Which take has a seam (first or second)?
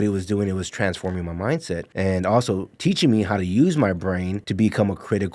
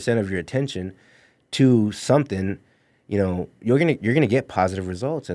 first